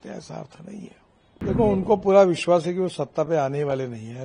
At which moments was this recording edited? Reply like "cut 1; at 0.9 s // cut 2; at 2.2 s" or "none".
cut 1; at 1.4 s